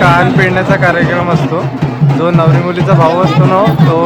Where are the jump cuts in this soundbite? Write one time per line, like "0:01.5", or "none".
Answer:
none